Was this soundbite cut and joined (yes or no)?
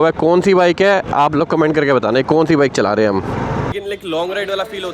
yes